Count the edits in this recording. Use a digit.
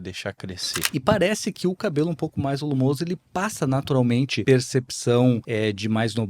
3